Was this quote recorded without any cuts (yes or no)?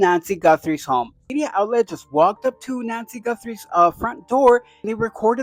no